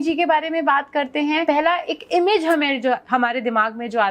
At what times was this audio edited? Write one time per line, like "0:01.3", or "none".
0:01.4